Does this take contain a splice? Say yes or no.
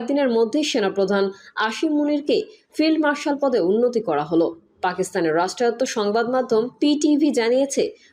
no